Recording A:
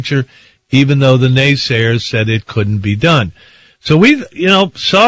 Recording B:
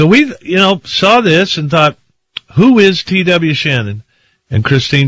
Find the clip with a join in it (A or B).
B